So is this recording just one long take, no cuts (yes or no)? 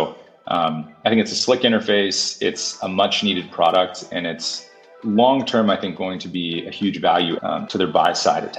no